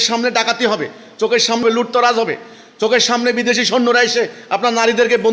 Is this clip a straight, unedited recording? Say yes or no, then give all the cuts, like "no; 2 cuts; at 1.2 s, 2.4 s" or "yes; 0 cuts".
no; 1 cut; at 1.6 s